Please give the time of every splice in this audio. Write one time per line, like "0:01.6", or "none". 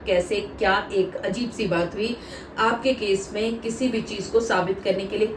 none